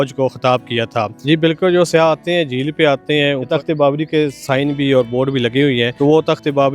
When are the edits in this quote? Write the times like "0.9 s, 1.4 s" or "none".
1.1 s, 3.5 s, 5.9 s